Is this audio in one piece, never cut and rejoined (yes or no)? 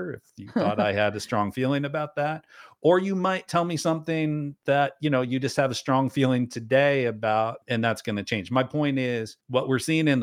no